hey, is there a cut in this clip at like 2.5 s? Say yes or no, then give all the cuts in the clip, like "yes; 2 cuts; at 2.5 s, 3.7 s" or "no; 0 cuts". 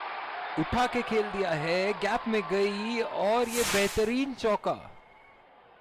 no; 1 cut; at 4.9 s